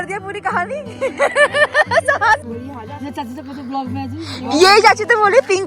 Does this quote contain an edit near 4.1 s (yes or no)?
no